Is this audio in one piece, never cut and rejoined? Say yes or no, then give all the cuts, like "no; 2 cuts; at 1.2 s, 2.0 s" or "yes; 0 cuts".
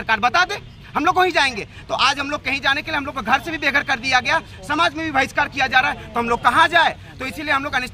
yes; 0 cuts